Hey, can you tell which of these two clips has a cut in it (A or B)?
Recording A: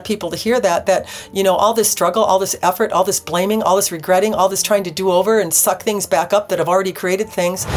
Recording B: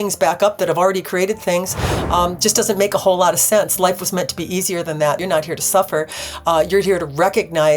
B